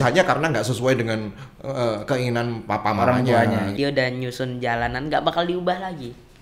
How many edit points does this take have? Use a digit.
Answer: 1